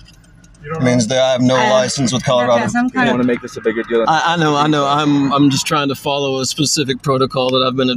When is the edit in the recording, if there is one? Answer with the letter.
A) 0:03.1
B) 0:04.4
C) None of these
A